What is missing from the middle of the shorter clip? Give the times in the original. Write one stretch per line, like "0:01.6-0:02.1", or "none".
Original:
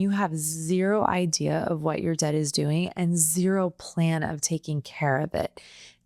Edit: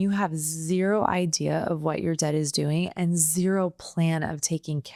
none